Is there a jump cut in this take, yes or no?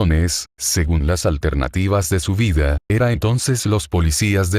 yes